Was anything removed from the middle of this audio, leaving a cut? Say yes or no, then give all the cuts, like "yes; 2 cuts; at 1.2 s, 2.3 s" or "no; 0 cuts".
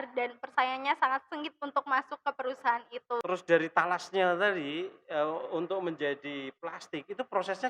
yes; 1 cut; at 3.2 s